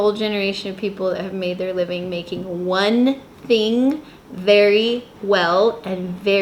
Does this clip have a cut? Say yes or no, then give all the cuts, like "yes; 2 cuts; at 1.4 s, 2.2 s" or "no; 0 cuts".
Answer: no; 0 cuts